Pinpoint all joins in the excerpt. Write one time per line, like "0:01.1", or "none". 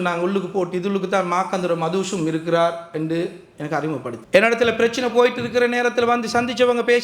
0:04.2